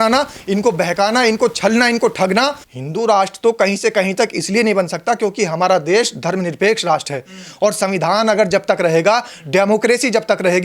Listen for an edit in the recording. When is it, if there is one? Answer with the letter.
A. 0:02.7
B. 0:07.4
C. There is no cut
A